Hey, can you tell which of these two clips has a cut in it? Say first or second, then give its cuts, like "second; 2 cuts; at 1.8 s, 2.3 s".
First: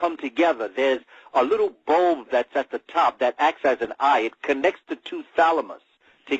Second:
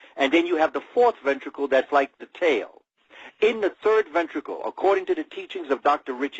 first; 1 cut; at 1.1 s